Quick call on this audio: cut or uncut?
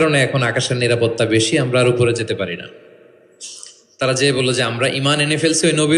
uncut